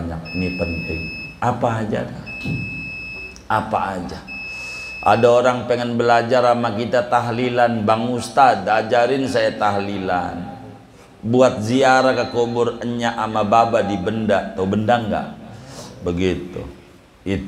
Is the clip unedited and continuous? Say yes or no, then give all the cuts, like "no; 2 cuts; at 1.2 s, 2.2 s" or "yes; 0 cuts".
yes; 0 cuts